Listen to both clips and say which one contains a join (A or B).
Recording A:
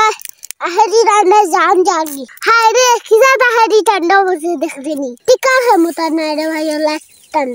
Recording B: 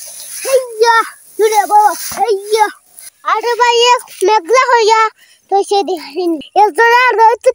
B